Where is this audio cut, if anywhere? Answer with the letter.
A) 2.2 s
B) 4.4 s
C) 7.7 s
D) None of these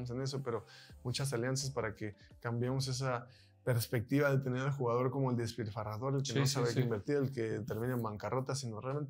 D